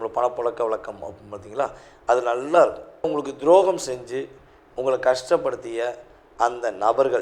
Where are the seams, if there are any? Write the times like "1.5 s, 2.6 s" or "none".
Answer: 3.1 s